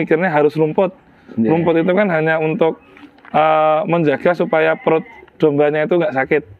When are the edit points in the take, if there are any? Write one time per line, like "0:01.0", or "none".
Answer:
none